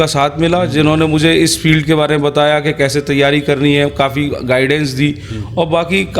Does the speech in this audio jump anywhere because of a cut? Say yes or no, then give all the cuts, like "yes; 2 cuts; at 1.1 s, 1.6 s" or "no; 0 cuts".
no; 0 cuts